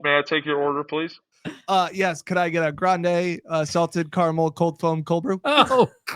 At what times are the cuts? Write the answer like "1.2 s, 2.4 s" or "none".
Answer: 1.1 s